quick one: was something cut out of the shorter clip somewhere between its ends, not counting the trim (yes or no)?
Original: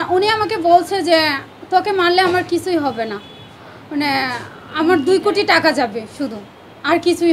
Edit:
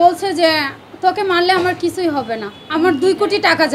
yes